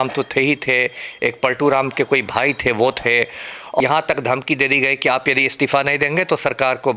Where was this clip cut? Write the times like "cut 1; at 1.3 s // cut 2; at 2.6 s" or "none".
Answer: cut 1; at 3.8 s